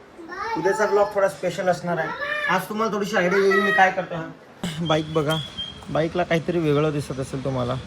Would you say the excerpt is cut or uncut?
cut